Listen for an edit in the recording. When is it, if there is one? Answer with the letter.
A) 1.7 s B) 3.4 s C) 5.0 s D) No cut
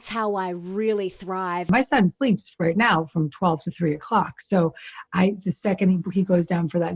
A